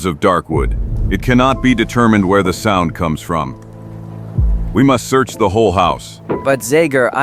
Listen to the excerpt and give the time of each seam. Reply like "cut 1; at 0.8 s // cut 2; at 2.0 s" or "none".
cut 1; at 4.7 s